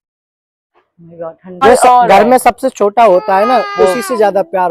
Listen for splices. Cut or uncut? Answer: cut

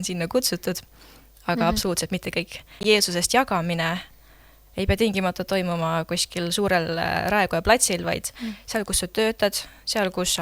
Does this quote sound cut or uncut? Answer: cut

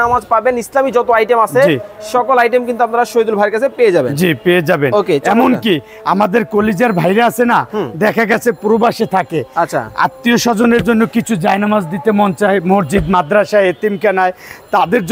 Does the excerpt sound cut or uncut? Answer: uncut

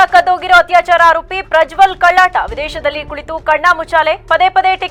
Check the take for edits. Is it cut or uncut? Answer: uncut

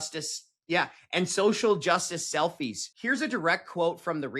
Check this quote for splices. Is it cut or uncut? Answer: cut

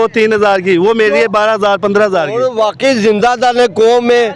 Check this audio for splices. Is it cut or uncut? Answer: cut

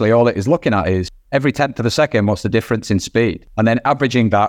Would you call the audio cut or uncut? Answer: cut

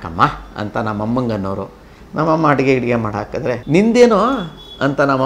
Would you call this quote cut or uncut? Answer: cut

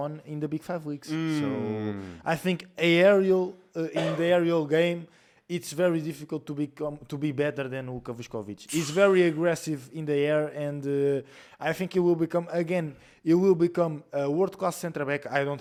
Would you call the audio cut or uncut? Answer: uncut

